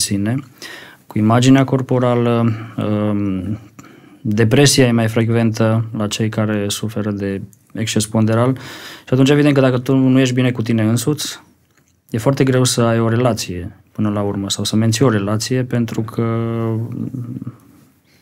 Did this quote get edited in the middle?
no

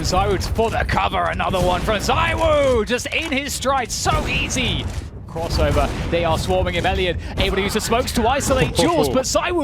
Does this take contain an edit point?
yes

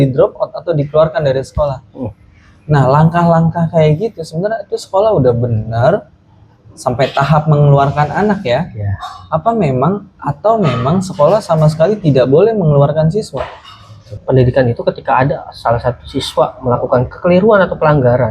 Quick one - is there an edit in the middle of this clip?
yes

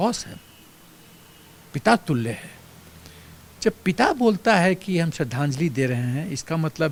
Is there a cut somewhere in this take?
no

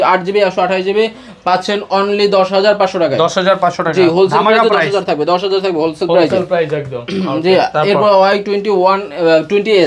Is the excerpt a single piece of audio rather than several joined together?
yes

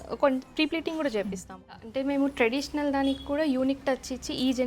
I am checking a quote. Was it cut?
yes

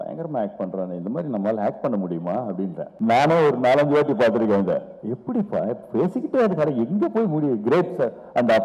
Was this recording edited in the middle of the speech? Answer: yes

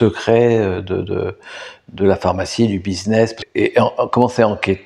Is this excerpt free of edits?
no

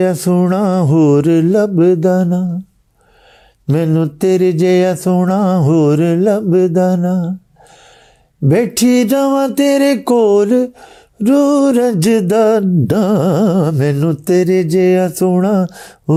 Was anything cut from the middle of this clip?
no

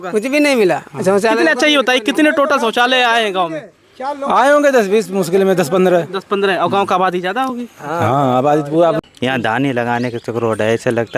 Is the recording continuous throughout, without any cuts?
no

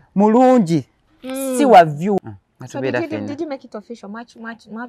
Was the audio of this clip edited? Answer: yes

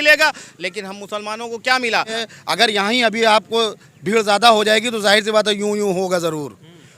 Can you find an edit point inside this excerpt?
yes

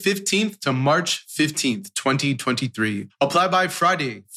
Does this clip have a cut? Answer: yes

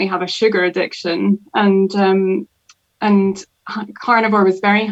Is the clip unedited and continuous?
yes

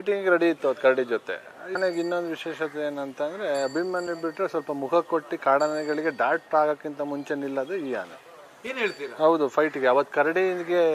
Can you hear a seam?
yes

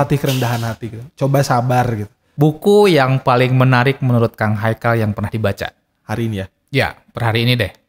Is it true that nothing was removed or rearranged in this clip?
no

